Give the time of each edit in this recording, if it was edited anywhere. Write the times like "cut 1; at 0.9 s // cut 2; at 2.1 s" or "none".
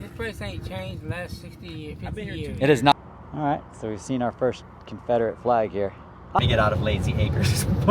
cut 1; at 2.9 s // cut 2; at 6.4 s